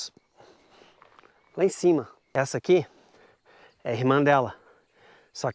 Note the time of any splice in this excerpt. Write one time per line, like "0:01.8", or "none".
0:02.2